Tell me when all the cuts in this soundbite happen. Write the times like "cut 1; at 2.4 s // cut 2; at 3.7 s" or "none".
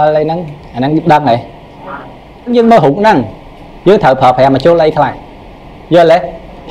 cut 1; at 2.3 s